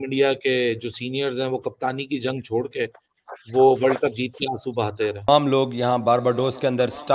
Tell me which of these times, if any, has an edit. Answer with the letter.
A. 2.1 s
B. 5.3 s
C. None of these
B